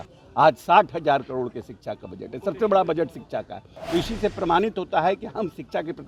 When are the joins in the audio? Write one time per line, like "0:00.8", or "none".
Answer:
none